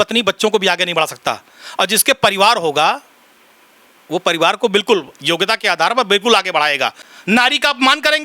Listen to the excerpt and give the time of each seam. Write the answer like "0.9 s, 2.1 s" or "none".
7.1 s